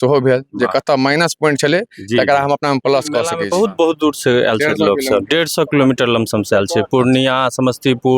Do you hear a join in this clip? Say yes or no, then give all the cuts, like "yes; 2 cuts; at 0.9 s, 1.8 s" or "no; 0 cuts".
yes; 1 cut; at 3.4 s